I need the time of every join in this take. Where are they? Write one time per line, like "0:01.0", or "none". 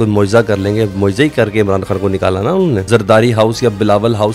0:02.8